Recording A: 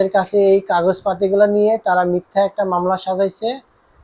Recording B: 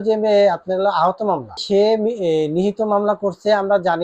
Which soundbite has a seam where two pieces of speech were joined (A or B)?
B